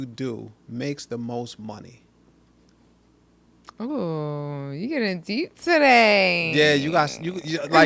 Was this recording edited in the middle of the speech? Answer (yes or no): no